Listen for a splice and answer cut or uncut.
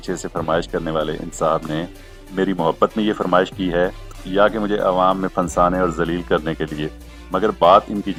uncut